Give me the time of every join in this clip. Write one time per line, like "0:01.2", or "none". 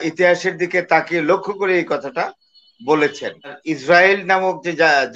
0:03.7